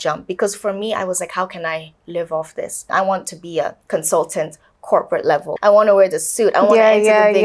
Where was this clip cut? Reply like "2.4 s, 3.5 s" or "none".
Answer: 2.9 s, 3.8 s, 5.5 s